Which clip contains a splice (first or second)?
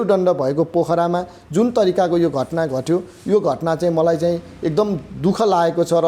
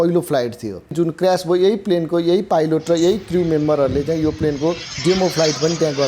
second